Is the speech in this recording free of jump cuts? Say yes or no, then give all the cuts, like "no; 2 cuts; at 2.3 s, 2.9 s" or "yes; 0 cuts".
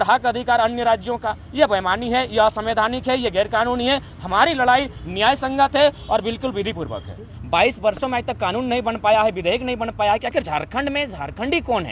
no; 1 cut; at 7.3 s